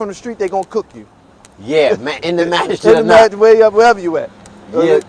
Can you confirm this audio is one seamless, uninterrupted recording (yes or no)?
yes